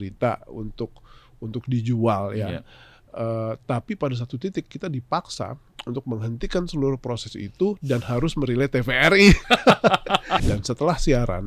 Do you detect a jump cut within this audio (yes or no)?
yes